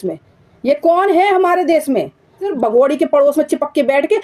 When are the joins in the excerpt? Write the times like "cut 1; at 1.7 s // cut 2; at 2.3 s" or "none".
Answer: cut 1; at 2.4 s